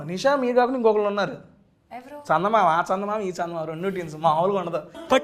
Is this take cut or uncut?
uncut